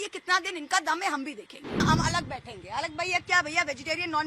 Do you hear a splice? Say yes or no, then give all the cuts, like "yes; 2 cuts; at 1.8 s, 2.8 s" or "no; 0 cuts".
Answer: yes; 1 cut; at 1.8 s